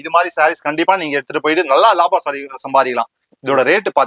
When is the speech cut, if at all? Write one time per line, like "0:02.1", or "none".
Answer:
none